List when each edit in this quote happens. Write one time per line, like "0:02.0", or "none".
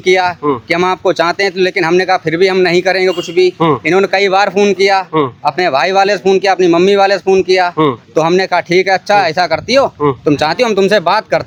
none